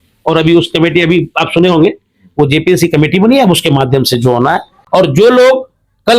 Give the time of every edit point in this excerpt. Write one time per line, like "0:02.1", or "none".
0:04.7